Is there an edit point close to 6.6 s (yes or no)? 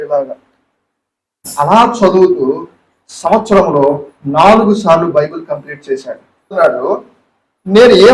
yes